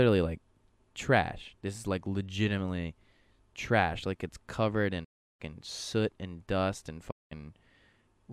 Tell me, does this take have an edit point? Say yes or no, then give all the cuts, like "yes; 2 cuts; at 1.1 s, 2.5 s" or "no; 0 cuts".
no; 0 cuts